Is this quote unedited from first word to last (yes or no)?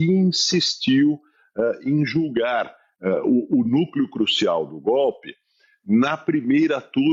yes